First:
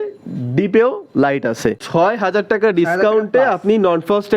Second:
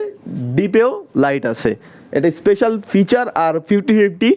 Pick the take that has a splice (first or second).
first